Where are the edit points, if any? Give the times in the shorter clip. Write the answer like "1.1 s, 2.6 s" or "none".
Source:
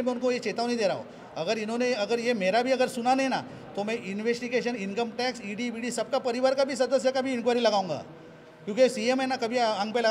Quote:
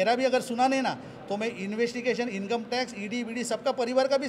none